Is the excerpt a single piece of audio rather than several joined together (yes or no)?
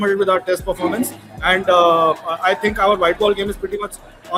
yes